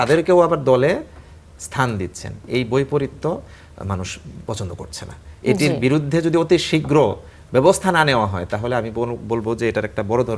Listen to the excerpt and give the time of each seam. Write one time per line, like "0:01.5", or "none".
none